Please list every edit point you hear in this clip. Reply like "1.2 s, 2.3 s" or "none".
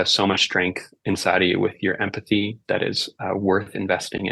2.6 s